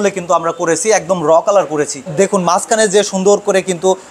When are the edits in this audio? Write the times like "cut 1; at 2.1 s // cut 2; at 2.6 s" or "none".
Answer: cut 1; at 2.1 s